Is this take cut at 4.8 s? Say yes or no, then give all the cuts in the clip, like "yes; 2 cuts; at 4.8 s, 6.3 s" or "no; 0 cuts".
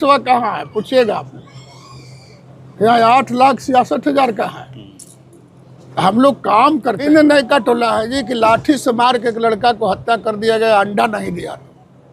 no; 1 cut; at 7.1 s